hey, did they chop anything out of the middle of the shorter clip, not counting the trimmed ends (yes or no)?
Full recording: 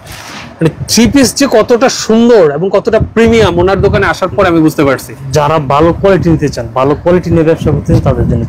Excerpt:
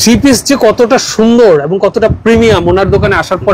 no